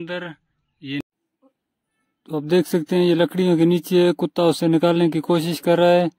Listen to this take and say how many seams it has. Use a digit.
1